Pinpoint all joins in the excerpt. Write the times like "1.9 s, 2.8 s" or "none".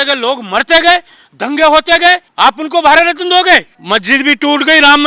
2.3 s, 3.8 s